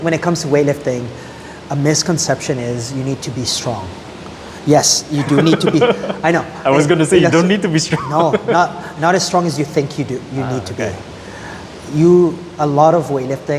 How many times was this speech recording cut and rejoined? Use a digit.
0